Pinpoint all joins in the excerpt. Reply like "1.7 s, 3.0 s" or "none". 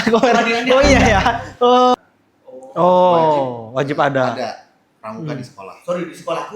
1.9 s